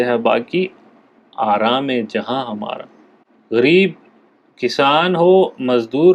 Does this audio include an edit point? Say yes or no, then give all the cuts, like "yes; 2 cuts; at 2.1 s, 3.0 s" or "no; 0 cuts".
yes; 1 cut; at 3.3 s